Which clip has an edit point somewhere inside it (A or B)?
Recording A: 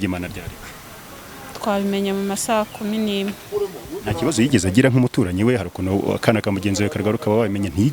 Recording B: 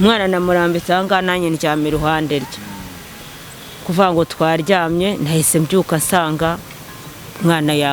A